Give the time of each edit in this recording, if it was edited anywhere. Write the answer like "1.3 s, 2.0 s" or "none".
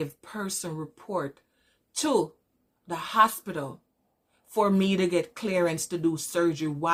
none